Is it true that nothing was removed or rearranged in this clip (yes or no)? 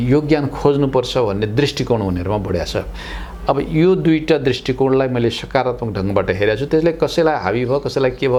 yes